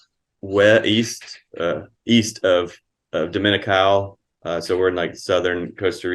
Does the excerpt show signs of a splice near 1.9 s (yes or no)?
no